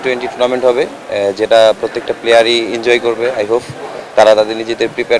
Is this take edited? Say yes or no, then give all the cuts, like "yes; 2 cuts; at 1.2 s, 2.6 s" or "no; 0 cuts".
no; 0 cuts